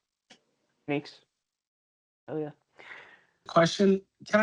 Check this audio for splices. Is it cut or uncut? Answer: cut